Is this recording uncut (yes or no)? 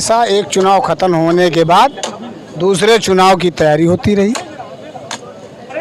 yes